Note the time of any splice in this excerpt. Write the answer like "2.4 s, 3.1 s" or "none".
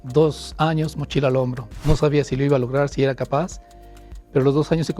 none